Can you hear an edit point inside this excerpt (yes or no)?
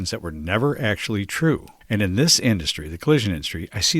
yes